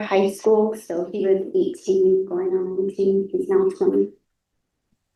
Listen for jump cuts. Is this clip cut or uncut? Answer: uncut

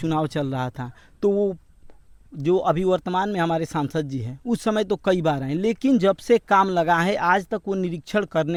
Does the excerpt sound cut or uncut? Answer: uncut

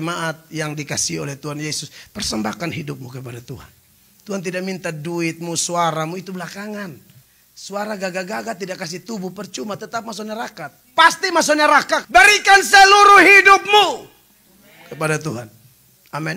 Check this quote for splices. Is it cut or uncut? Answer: cut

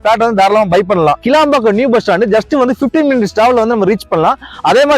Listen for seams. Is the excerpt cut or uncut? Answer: cut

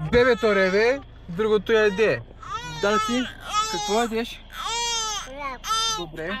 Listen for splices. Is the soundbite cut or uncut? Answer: uncut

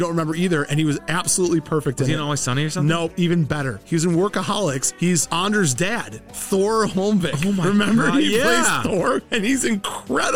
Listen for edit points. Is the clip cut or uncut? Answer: uncut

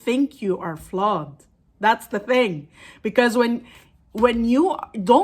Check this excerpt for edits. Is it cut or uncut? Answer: uncut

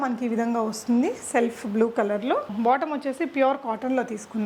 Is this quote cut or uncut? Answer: uncut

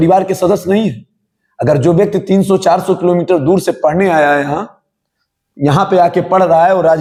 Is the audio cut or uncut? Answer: uncut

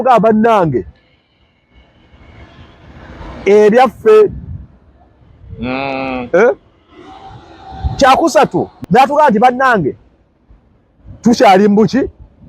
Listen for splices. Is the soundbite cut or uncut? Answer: cut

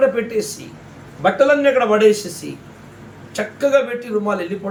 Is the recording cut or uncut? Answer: uncut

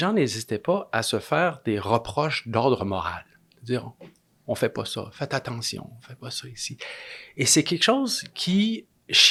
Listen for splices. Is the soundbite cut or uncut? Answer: uncut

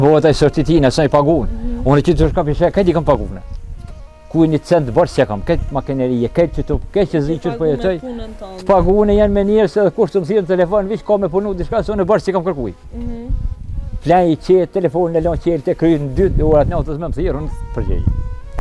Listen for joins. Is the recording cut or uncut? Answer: uncut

